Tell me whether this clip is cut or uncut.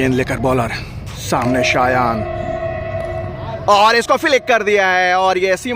uncut